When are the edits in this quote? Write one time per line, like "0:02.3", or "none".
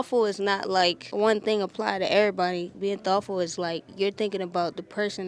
0:01.0